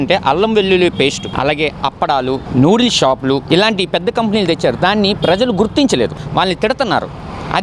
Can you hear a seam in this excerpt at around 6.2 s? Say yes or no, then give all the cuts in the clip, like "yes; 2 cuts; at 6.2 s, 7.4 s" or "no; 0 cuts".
yes; 3 cuts; at 1.3 s, 2.4 s, 6.2 s